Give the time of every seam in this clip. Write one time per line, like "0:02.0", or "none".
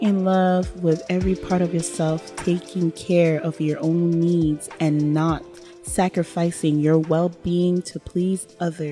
none